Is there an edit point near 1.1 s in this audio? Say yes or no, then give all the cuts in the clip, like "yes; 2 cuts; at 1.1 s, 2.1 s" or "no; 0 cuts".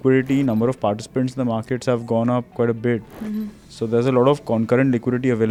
no; 0 cuts